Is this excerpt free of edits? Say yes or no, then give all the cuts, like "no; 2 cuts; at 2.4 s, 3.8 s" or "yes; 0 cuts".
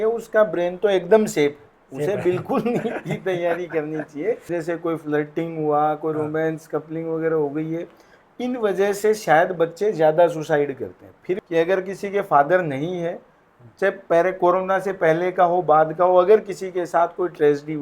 no; 2 cuts; at 4.5 s, 11.4 s